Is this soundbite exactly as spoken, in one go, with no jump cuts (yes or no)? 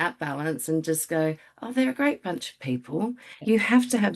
yes